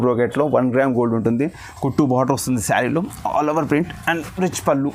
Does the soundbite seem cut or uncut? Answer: uncut